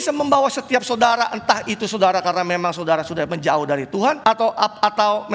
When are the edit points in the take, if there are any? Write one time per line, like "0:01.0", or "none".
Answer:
0:04.2